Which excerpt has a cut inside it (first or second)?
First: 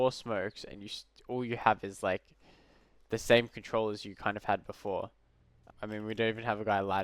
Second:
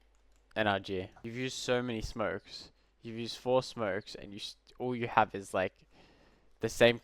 second